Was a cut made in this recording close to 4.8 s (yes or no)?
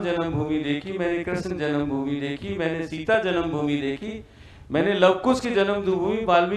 no